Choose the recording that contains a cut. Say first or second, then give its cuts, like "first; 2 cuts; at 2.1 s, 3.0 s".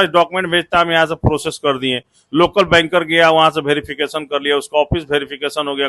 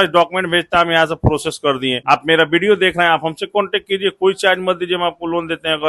second; 1 cut; at 2.0 s